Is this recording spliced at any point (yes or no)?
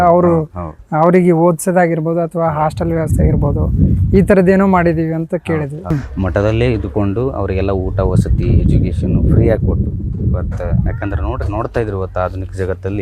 yes